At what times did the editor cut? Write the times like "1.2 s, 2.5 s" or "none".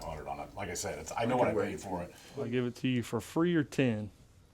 2.2 s

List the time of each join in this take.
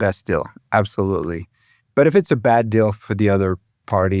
3.0 s

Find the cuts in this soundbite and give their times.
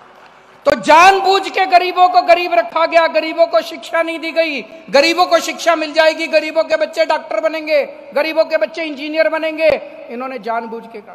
none

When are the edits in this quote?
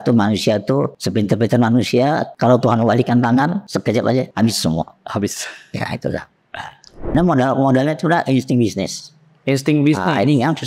1.0 s, 2.3 s, 4.1 s, 7.1 s

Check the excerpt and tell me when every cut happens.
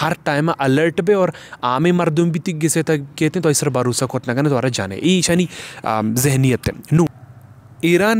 7.2 s

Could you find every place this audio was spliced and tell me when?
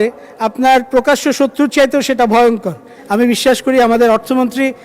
2.9 s

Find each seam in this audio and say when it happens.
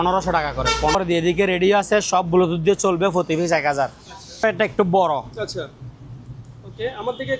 0.9 s, 4.4 s

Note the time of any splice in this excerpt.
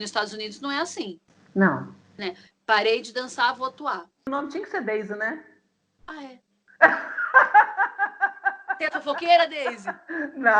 4.3 s

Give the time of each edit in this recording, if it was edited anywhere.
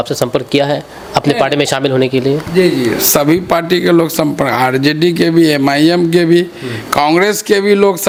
none

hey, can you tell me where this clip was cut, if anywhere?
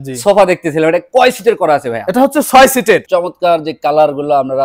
3.0 s

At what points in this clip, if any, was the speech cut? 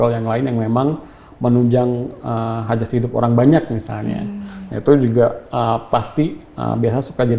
none

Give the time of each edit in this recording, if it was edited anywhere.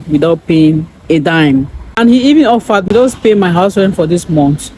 1.8 s, 2.9 s

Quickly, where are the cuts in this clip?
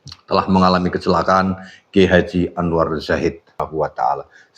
3.6 s

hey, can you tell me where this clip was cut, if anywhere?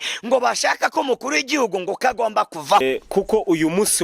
2.8 s

